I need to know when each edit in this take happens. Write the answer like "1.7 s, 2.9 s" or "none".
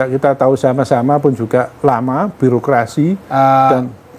none